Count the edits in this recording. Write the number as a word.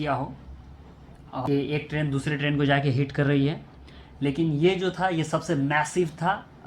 one